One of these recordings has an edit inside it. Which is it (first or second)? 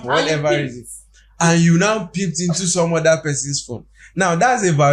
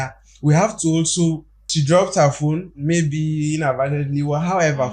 second